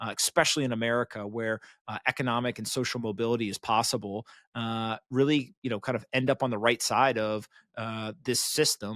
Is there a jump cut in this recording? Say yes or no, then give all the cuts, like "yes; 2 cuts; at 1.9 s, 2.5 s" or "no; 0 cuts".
no; 0 cuts